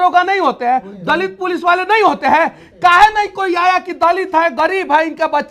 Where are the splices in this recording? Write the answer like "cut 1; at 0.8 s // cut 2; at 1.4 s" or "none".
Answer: none